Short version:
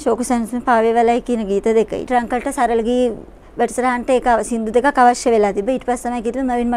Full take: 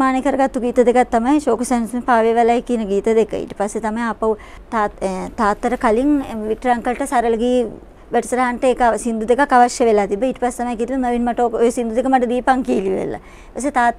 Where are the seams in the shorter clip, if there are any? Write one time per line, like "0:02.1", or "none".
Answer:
0:02.1